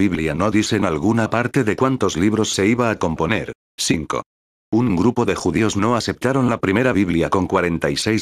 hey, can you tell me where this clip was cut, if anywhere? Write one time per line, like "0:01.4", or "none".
0:03.6